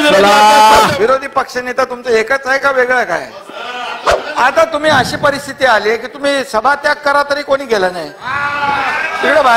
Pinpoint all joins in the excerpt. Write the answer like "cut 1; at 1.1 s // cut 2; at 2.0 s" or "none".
cut 1; at 0.9 s // cut 2; at 4.2 s